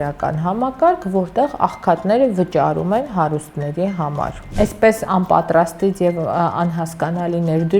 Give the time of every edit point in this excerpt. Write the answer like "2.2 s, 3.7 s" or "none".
4.4 s